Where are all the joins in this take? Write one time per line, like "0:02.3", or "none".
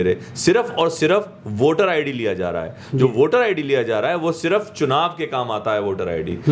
none